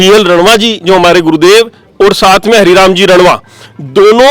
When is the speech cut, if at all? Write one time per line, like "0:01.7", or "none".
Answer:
none